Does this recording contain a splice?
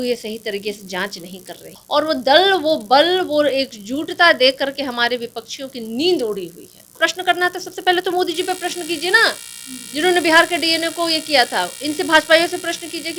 yes; 2 cuts; at 1.7 s, 7.0 s

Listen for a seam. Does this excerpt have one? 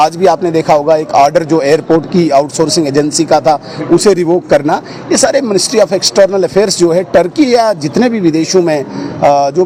no; 0 cuts

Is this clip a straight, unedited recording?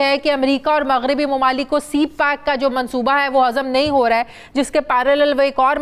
yes; 0 cuts

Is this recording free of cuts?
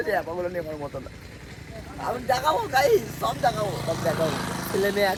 yes; 0 cuts

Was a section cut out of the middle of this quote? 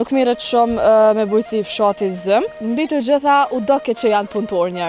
yes; 1 cut; at 2.6 s

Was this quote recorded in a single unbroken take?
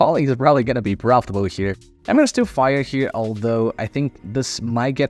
no; 1 cut; at 1.9 s

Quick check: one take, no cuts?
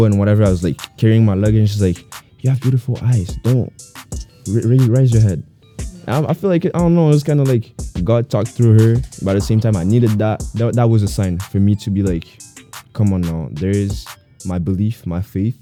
yes; 0 cuts

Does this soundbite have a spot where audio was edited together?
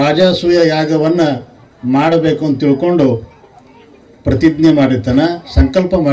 no; 0 cuts

